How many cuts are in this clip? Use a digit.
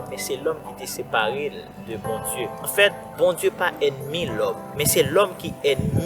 2